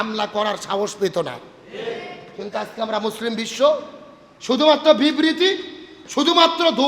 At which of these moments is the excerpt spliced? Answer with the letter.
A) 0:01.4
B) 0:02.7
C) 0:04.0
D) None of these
D